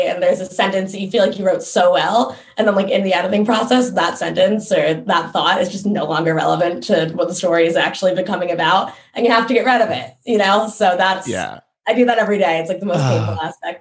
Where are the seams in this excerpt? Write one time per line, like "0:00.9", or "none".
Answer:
none